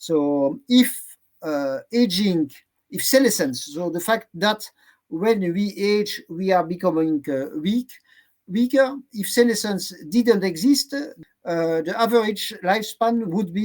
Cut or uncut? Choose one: cut